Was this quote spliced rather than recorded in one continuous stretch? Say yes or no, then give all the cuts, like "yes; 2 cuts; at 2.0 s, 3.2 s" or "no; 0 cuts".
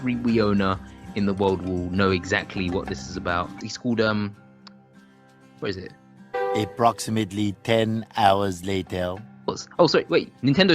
yes; 1 cut; at 3.7 s